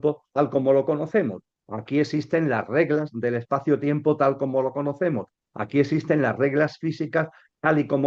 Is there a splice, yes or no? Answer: no